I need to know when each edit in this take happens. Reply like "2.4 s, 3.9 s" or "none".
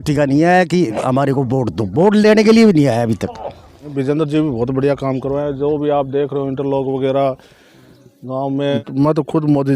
4.1 s, 8.8 s